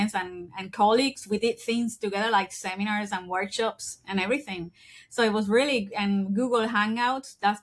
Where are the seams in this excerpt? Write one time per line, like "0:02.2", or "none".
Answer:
none